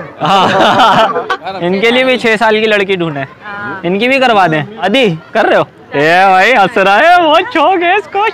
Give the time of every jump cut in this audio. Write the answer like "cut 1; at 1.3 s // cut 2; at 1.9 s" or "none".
cut 1; at 1.3 s // cut 2; at 4.9 s